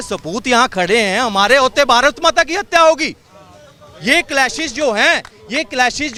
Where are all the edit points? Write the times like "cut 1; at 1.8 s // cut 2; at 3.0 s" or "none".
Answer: none